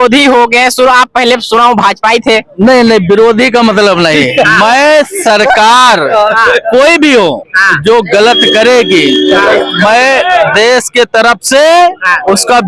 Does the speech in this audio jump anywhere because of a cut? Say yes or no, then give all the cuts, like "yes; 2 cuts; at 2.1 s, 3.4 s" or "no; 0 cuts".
no; 0 cuts